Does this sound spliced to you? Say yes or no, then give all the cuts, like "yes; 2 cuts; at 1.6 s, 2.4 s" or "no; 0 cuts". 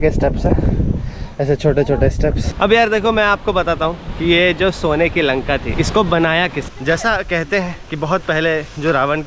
yes; 2 cuts; at 2.5 s, 6.6 s